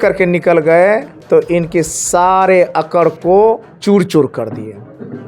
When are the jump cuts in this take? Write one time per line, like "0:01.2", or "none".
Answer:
0:01.1
0:03.7

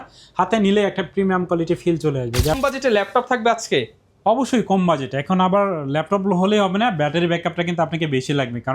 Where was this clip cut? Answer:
0:02.5

